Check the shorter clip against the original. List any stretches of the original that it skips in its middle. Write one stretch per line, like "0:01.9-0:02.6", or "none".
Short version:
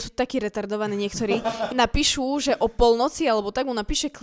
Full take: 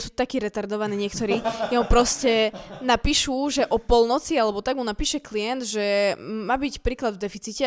0:01.6-0:02.7